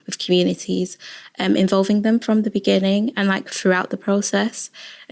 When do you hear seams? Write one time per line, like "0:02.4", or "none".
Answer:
none